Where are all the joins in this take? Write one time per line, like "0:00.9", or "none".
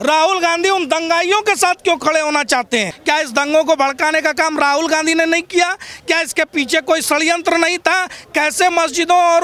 0:02.9

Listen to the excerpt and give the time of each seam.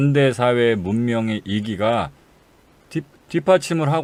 none

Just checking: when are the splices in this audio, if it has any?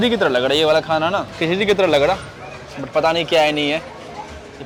none

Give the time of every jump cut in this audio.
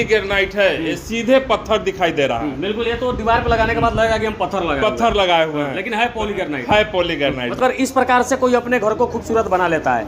0:07.6

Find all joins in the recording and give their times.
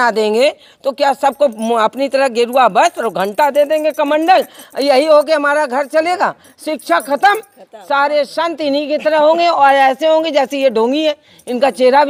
none

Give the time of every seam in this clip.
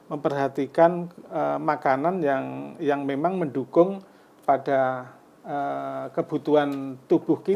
none

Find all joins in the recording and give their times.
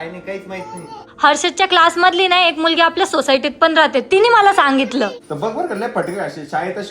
0:01.1
0:05.2

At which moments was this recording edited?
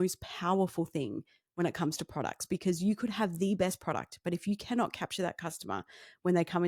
none

